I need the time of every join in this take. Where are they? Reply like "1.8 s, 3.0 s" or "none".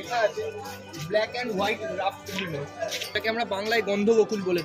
3.1 s